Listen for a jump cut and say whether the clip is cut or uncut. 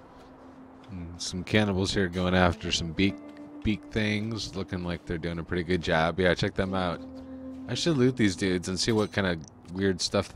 cut